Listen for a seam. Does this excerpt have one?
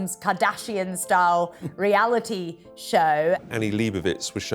yes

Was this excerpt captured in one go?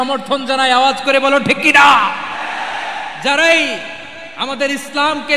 yes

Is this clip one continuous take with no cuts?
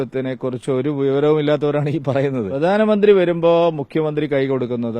no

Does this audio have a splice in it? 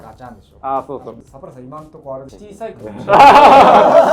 yes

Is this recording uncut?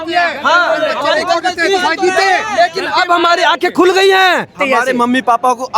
no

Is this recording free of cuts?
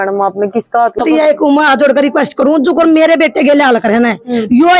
no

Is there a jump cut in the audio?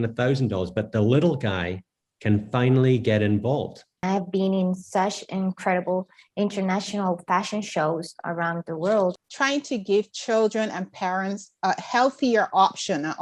yes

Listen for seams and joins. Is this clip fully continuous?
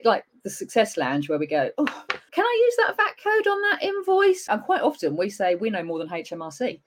no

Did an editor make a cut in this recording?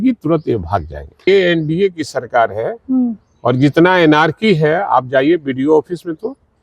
yes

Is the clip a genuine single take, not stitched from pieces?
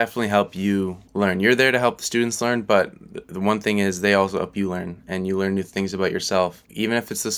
no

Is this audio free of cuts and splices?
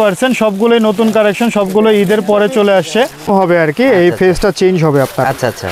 no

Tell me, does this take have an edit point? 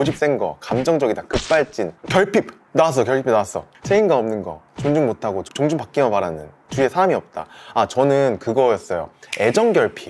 no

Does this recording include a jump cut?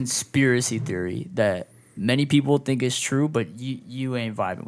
no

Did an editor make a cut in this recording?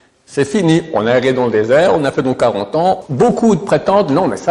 yes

